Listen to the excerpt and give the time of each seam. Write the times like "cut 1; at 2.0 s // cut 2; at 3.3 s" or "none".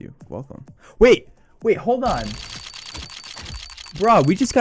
cut 1; at 2.4 s // cut 2; at 3.7 s